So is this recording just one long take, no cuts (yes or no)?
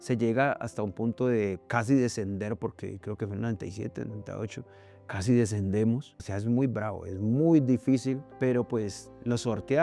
no